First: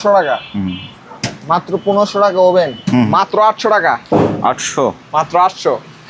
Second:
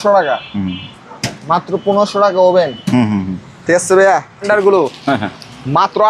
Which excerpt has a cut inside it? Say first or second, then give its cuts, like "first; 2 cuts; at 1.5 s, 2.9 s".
first; 1 cut; at 3.1 s